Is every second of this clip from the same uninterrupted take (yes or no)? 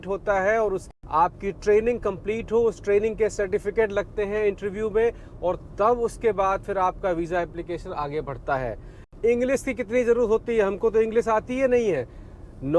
no